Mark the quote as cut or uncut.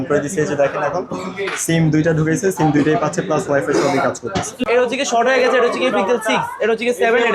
cut